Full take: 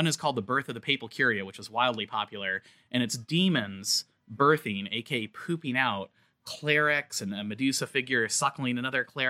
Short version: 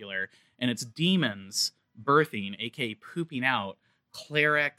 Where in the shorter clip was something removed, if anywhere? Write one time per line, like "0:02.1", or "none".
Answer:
none